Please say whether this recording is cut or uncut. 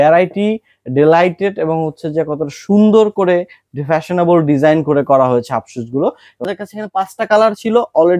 cut